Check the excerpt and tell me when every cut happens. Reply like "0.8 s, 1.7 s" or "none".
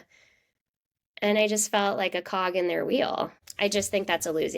3.4 s